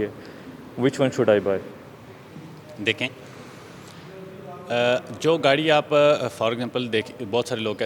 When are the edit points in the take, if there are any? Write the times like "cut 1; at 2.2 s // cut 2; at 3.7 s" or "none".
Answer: none